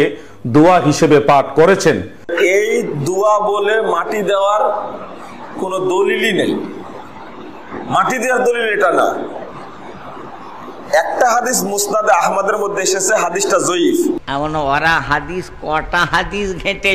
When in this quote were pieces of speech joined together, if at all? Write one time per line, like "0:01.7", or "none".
0:02.3
0:14.2